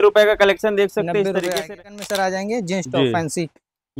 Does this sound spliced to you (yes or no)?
yes